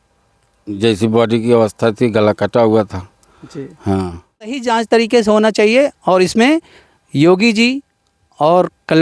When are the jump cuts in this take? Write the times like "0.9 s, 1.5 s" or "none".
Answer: 4.6 s